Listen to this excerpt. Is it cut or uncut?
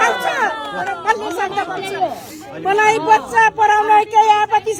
uncut